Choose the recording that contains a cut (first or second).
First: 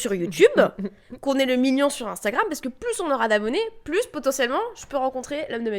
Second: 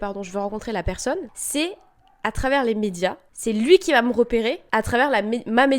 second